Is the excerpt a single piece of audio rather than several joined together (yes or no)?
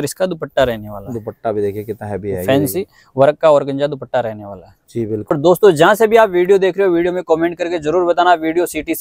no